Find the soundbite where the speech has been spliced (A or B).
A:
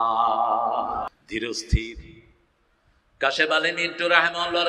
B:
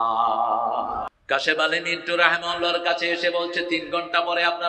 B